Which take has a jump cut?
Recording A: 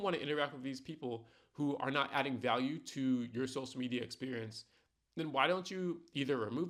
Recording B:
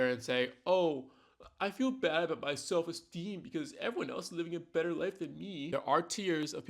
B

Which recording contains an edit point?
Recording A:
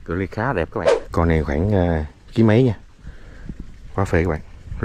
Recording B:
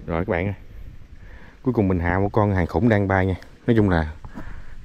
A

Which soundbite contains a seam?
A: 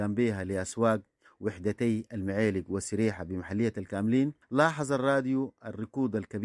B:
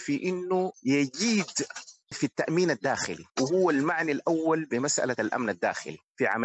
A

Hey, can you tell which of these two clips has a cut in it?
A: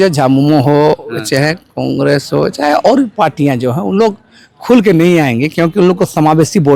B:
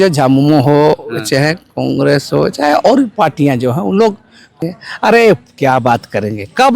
B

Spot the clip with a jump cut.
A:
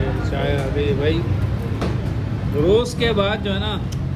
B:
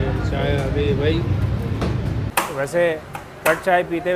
B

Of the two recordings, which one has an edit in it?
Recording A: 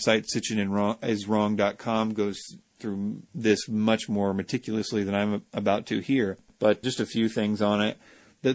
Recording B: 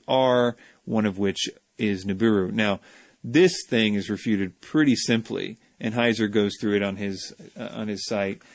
A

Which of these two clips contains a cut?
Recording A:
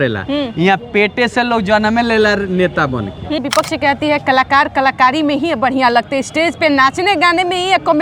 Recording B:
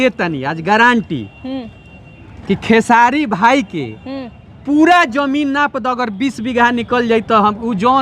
A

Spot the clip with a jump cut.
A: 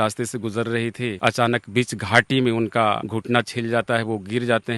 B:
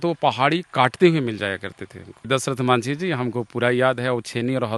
A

